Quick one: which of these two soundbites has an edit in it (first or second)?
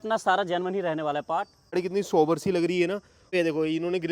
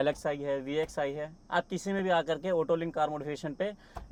first